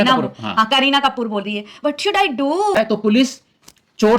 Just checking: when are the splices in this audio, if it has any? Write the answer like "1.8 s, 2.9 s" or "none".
2.7 s